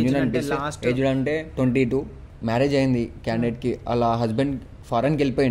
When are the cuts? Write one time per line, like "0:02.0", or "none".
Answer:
0:02.3